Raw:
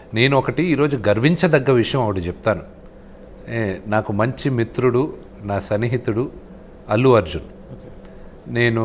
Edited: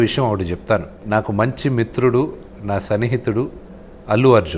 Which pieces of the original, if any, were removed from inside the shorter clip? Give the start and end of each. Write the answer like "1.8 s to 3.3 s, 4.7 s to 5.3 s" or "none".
2.8 s to 3.8 s